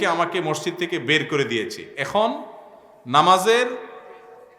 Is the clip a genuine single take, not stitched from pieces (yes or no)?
yes